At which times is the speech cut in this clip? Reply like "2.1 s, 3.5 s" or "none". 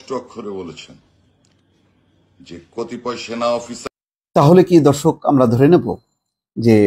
3.8 s